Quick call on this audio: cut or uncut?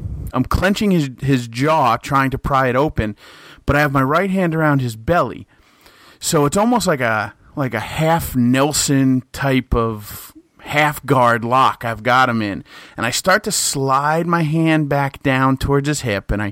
uncut